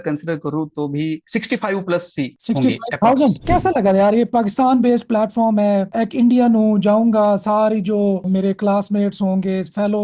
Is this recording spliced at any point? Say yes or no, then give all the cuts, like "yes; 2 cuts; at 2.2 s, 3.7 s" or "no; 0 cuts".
yes; 2 cuts; at 3.4 s, 8.3 s